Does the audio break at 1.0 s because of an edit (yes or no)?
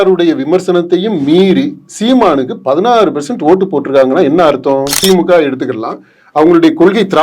no